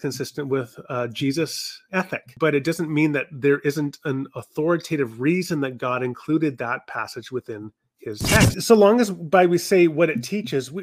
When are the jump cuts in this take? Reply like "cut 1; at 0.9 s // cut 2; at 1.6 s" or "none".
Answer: cut 1; at 2.2 s // cut 2; at 8.5 s